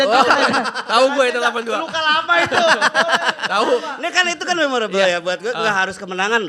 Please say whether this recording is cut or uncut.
uncut